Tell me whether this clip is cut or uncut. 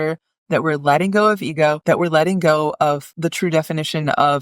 cut